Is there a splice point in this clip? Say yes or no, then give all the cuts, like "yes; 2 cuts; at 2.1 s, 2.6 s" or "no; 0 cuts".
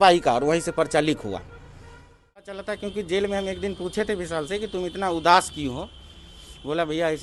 yes; 1 cut; at 2.6 s